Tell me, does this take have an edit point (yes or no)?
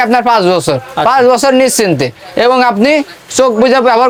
no